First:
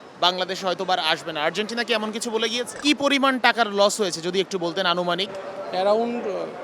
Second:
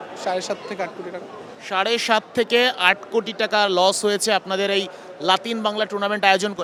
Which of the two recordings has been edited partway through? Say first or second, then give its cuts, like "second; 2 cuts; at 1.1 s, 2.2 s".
first; 1 cut; at 2.7 s